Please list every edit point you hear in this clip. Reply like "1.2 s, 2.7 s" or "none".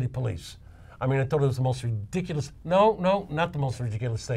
2.5 s